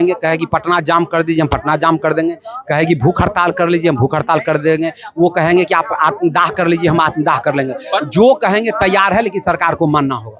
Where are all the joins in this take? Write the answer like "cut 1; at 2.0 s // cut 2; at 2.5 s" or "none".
none